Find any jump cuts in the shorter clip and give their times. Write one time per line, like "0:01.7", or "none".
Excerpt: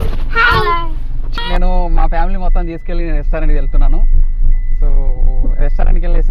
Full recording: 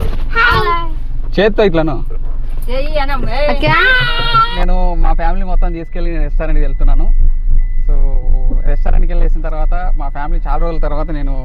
0:01.3